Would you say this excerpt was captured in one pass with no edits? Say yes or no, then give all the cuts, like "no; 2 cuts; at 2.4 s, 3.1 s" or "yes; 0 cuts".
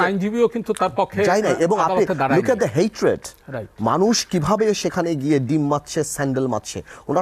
yes; 0 cuts